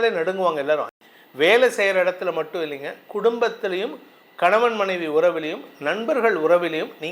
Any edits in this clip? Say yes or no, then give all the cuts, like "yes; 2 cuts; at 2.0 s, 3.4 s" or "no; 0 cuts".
yes; 1 cut; at 1.0 s